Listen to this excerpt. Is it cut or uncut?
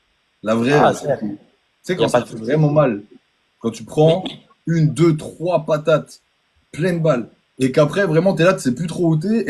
uncut